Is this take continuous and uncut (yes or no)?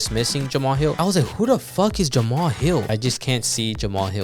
no